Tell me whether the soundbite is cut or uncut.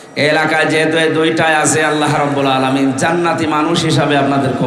uncut